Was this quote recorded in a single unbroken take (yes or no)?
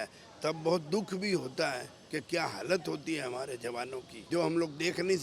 no